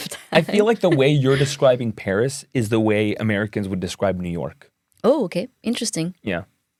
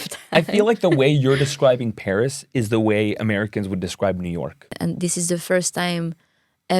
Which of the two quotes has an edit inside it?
second; 1 cut; at 4.7 s

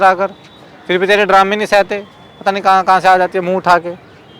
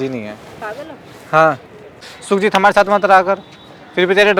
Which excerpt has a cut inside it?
second; 1 cut; at 2.1 s

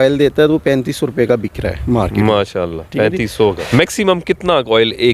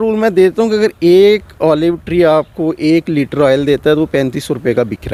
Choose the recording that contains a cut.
first; 1 cut; at 3.5 s

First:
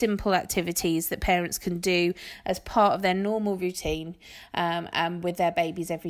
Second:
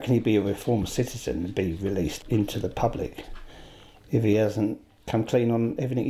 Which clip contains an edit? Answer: second; 2 cuts; at 2.2 s, 4.9 s

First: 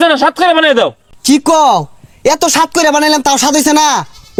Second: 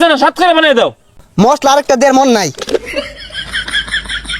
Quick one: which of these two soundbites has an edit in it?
second; 2 cuts; at 1.1 s, 3.0 s

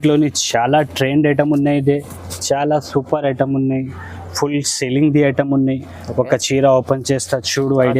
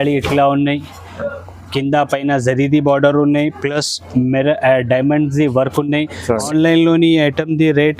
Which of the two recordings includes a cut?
second; 1 cut; at 6.4 s

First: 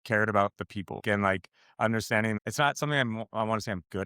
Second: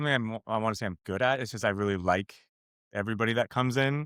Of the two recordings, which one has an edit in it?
first; 1 cut; at 1.0 s

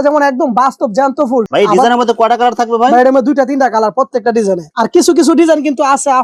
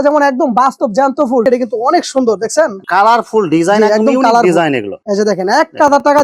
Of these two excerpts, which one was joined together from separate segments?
second; 2 cuts; at 1.4 s, 5.0 s

